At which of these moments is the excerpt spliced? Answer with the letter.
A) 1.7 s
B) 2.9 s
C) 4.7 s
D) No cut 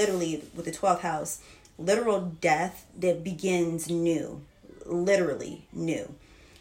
D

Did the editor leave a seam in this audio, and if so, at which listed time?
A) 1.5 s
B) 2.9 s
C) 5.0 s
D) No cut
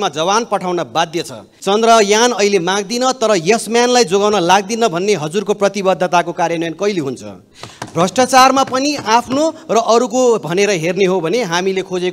A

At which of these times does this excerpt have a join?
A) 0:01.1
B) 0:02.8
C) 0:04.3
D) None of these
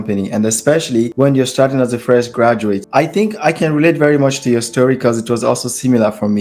A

